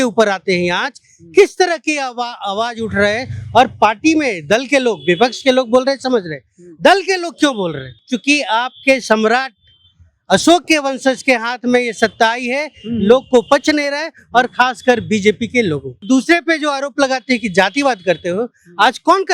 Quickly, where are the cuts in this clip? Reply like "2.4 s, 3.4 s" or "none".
8.0 s, 16.0 s